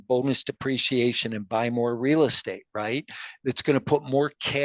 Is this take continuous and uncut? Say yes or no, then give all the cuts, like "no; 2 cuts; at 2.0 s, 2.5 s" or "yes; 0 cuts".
yes; 0 cuts